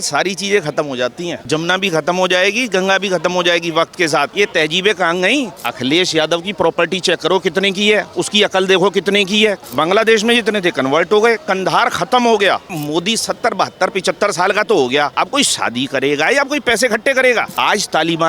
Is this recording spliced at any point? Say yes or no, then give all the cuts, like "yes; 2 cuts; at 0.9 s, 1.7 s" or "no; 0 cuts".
yes; 7 cuts; at 1.4 s, 4.3 s, 5.6 s, 9.6 s, 12.8 s, 15.1 s, 17.5 s